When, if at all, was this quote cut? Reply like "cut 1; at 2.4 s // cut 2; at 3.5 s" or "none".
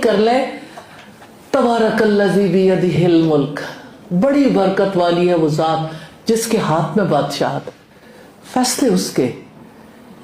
none